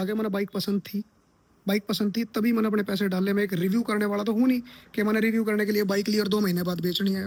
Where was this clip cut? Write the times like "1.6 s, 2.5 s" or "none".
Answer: none